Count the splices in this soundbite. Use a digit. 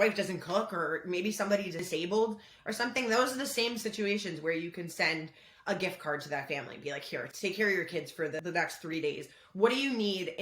3